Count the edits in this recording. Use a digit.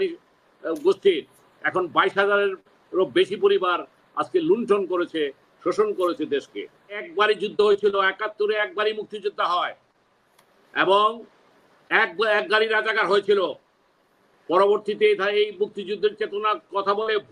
1